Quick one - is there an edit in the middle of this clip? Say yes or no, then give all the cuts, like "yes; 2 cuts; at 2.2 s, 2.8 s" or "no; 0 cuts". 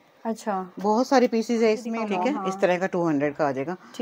yes; 1 cut; at 2.0 s